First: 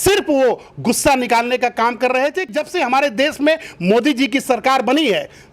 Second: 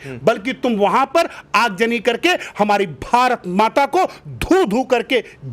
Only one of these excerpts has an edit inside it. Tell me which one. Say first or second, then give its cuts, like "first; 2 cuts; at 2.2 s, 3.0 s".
first; 1 cut; at 2.5 s